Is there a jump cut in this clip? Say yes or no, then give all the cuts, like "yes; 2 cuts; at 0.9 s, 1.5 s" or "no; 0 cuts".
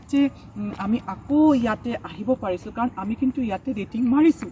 no; 0 cuts